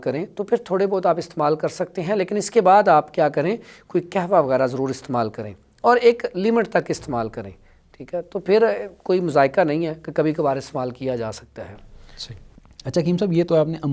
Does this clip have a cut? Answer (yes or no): no